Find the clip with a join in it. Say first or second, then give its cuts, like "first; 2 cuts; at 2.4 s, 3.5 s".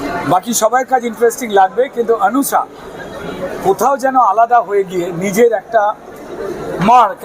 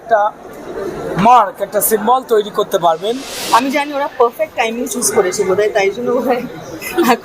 second; 1 cut; at 3.3 s